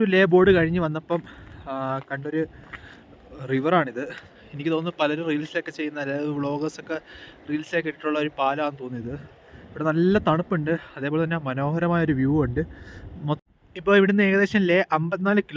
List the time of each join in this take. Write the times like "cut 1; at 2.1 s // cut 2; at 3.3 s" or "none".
cut 1; at 13.5 s